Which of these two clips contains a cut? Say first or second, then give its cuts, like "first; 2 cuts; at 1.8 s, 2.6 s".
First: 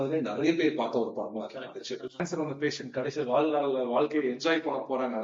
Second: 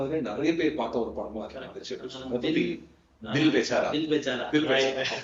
first; 1 cut; at 2.2 s